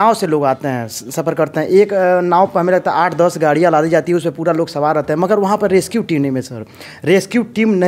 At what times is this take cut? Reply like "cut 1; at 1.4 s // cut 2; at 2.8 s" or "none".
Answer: none